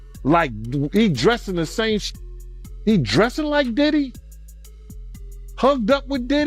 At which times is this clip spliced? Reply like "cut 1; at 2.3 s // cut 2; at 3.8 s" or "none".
cut 1; at 4.1 s // cut 2; at 5.6 s

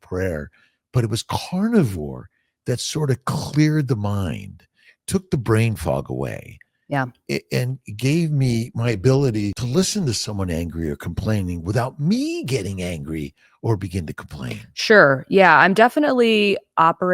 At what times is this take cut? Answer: cut 1; at 9.6 s

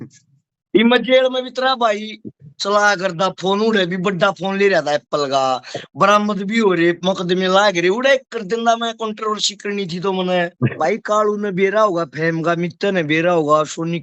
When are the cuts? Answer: cut 1; at 10.7 s

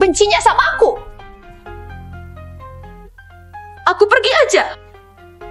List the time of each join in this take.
none

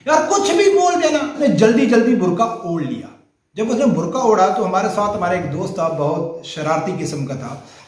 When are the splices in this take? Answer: cut 1; at 1.4 s

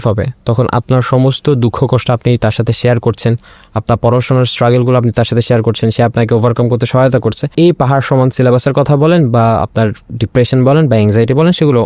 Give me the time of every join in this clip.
cut 1; at 7.4 s

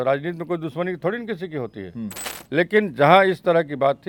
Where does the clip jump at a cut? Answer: none

